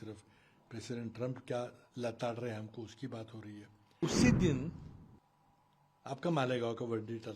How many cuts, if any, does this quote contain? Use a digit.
1